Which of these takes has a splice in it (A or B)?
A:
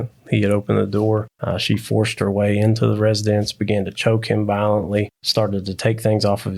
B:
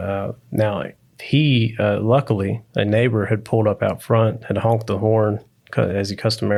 A